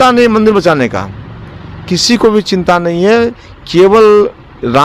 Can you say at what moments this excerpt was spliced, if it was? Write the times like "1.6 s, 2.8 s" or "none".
none